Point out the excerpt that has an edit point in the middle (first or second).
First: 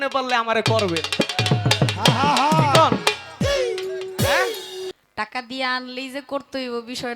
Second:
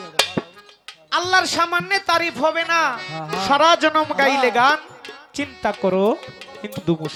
first